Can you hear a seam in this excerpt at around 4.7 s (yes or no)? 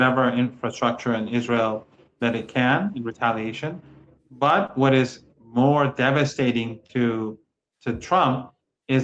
no